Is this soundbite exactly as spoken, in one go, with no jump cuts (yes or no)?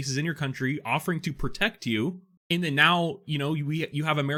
yes